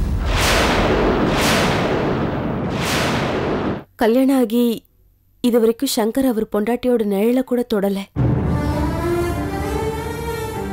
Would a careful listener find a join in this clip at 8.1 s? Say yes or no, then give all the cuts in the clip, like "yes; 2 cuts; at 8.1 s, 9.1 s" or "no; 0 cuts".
no; 1 cut; at 3.8 s